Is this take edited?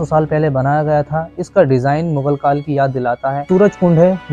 yes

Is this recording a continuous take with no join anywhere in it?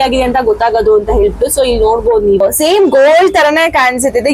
no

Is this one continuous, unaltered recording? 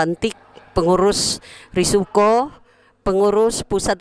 yes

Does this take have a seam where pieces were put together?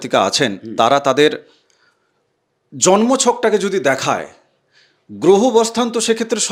no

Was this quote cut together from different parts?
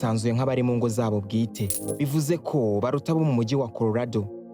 no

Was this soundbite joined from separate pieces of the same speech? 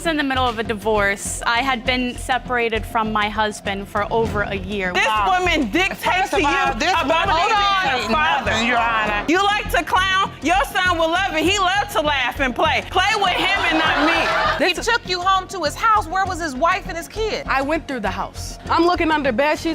yes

